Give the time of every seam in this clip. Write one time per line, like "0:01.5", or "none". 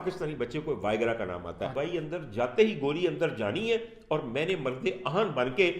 0:01.7